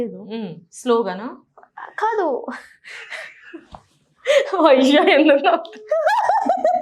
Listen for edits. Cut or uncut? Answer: uncut